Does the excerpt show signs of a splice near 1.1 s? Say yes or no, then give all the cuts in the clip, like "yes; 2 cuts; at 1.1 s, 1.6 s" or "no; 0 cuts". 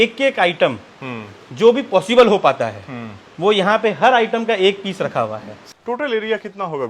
no; 1 cut; at 5.6 s